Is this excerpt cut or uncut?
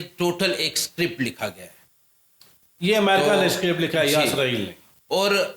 uncut